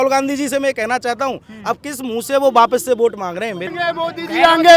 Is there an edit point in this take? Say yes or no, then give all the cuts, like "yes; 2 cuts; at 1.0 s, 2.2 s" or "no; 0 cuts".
yes; 1 cut; at 3.7 s